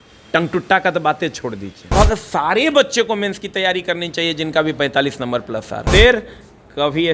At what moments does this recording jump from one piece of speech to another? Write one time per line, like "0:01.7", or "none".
0:01.9
0:05.9